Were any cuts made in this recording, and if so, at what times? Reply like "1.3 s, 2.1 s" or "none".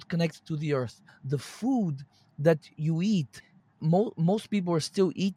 1.1 s, 3.8 s